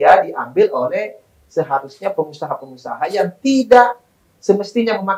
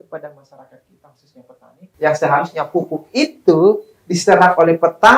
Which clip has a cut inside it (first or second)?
second